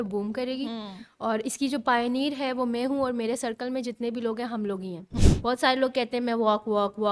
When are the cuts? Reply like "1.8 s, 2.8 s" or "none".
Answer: 5.2 s